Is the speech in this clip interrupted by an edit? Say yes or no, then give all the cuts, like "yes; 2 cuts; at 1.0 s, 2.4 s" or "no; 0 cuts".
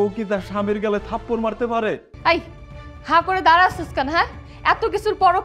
yes; 1 cut; at 2.1 s